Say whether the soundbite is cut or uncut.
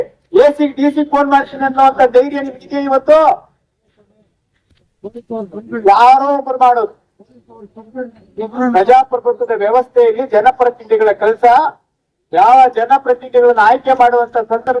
uncut